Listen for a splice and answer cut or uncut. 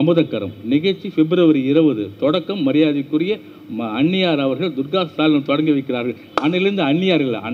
uncut